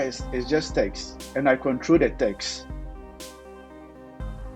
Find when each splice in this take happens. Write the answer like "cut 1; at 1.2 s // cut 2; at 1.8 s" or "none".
cut 1; at 2.4 s